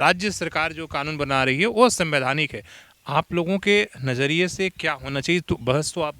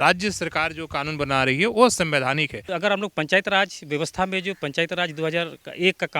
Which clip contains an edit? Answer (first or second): second